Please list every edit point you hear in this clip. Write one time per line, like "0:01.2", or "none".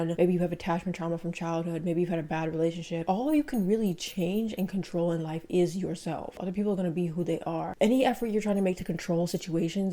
0:03.0
0:06.4
0:07.7